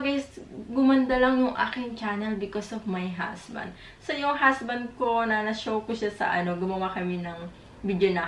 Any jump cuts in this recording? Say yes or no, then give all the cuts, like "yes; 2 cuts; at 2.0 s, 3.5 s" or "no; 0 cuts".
no; 0 cuts